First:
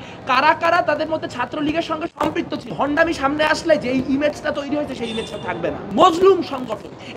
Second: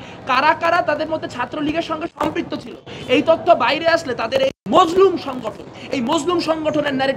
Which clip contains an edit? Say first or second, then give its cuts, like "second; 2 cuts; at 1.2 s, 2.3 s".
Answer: first; 2 cuts; at 2.7 s, 5.9 s